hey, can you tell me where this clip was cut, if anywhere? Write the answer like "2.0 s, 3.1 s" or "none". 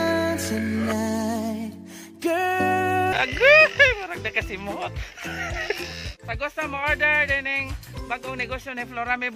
6.1 s